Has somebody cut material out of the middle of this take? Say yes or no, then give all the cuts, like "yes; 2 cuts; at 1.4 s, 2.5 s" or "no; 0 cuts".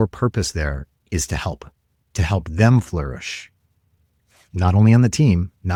no; 0 cuts